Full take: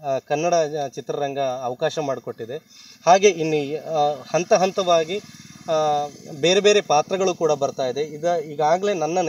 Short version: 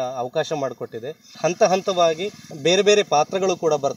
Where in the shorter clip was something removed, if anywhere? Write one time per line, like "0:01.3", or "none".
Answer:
0:01.3
0:02.4